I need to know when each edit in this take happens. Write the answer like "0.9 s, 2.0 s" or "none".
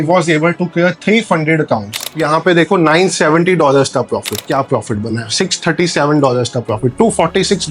2.2 s, 4.5 s